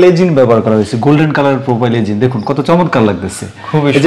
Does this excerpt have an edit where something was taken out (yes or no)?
no